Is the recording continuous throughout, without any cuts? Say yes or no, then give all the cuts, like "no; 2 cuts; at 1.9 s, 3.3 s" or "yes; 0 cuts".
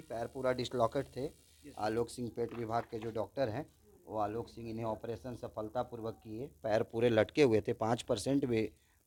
yes; 0 cuts